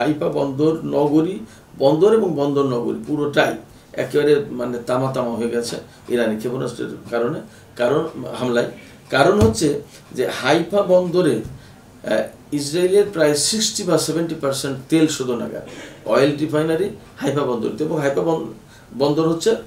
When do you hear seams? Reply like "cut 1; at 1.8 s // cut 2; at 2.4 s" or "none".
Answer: none

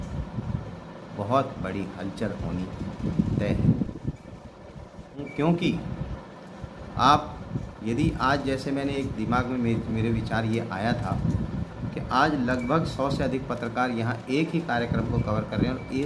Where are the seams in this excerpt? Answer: cut 1; at 5.2 s

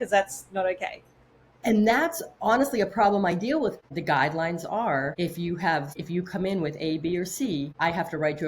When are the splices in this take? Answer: cut 1; at 3.9 s // cut 2; at 5.1 s // cut 3; at 6.0 s // cut 4; at 7.7 s

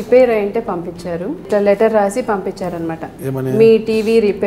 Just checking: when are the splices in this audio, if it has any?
cut 1; at 1.4 s

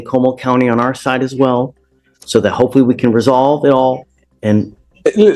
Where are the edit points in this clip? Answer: none

